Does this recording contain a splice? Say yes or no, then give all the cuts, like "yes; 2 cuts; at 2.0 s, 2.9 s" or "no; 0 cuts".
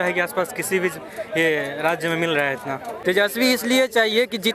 yes; 1 cut; at 2.9 s